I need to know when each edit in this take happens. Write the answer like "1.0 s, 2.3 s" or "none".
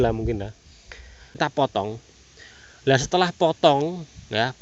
1.3 s